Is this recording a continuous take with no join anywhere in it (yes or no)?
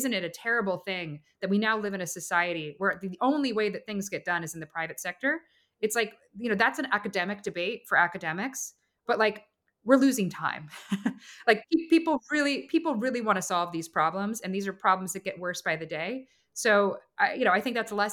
yes